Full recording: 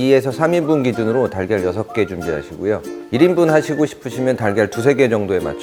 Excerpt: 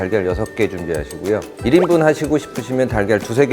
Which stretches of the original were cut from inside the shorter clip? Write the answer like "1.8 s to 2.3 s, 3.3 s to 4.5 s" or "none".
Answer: 2.9 s to 3.0 s